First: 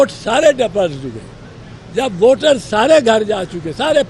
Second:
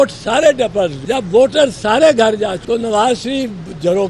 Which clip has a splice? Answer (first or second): second